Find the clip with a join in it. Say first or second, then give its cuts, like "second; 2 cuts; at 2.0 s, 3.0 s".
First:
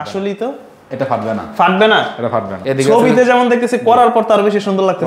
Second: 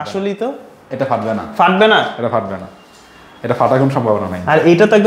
first; 1 cut; at 2.6 s